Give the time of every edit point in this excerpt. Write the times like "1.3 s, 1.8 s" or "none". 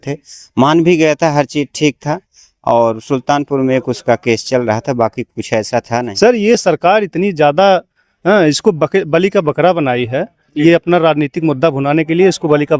6.1 s